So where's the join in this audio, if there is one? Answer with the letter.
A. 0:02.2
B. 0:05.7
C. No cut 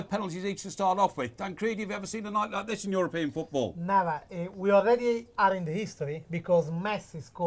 B